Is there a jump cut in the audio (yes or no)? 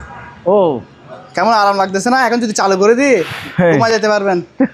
no